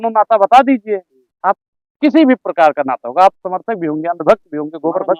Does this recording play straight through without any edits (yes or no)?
yes